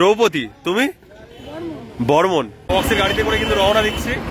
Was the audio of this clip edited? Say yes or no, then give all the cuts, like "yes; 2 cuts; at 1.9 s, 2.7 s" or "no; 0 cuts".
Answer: yes; 1 cut; at 2.6 s